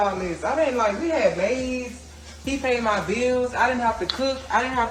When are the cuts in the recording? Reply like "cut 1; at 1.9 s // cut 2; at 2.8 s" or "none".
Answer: none